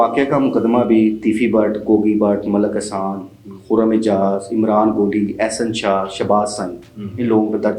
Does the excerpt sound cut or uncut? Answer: uncut